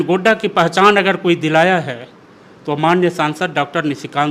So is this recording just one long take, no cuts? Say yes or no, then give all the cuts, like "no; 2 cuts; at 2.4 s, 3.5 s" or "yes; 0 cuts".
yes; 0 cuts